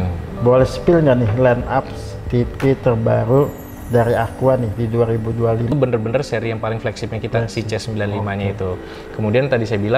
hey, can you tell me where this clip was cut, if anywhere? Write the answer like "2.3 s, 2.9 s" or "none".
5.7 s